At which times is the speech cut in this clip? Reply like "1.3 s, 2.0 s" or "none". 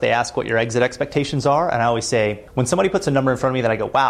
2.4 s